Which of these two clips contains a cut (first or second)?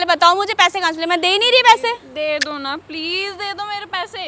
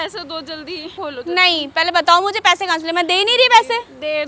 second